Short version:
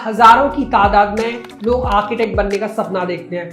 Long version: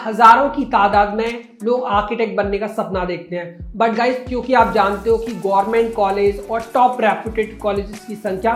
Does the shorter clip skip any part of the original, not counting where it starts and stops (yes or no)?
no